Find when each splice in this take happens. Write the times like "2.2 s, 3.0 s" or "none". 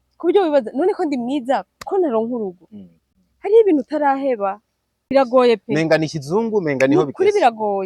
5.0 s